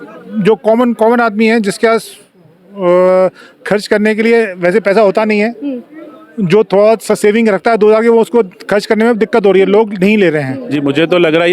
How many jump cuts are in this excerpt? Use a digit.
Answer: 1